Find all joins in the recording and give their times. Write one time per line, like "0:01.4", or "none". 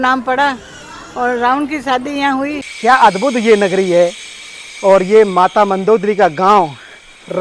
0:02.6